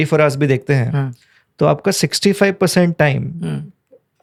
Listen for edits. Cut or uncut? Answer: uncut